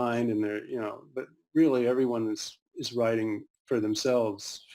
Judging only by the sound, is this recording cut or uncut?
uncut